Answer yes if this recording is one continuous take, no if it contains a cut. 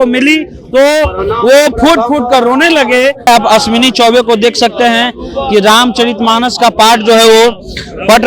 no